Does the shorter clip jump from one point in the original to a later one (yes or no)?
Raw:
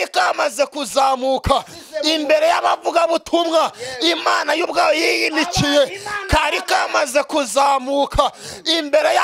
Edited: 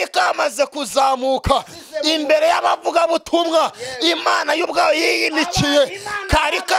no